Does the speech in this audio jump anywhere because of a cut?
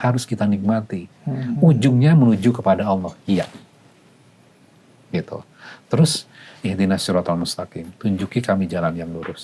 no; 0 cuts

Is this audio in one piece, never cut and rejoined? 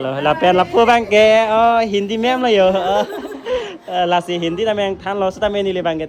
yes; 0 cuts

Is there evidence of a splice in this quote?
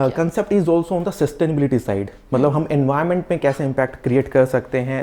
no; 0 cuts

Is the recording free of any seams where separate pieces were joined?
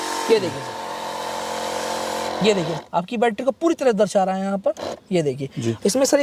yes; 0 cuts

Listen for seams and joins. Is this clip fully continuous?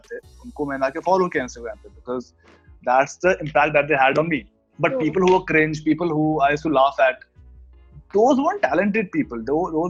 yes; 0 cuts

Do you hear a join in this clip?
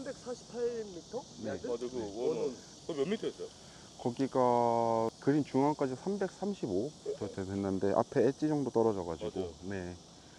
yes; 3 cuts; at 2.7 s, 5.1 s, 7.0 s

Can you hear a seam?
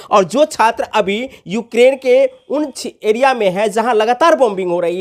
no; 0 cuts

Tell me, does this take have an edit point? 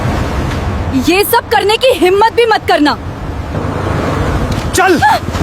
no; 0 cuts

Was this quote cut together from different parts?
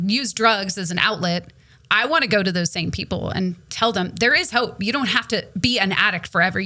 no; 0 cuts

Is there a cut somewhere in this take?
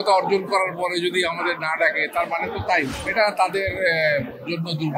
yes; 1 cut; at 3.0 s

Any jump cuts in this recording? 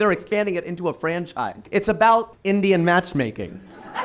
yes; 2 cuts; at 1.6 s, 2.3 s

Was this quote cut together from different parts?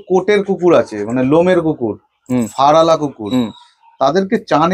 no; 0 cuts

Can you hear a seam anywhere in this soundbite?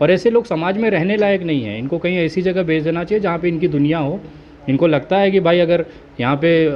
no; 0 cuts

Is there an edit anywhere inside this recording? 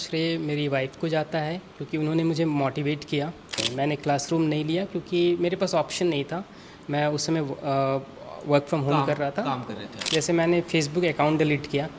yes; 2 cuts; at 3.7 s, 10.0 s

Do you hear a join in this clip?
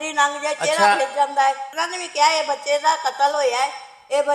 yes; 1 cut; at 1.8 s

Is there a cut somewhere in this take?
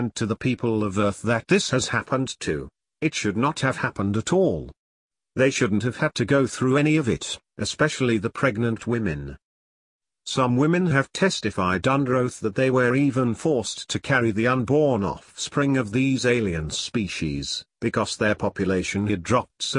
yes; 1 cut; at 11.4 s

